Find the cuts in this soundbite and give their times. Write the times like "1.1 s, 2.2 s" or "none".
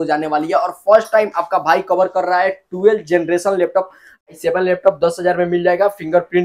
4.2 s